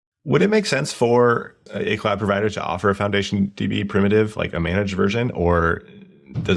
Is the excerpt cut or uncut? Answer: cut